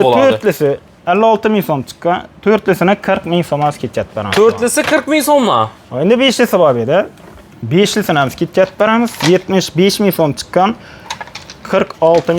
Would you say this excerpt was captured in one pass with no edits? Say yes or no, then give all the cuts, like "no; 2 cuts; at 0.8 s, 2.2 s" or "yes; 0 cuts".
yes; 0 cuts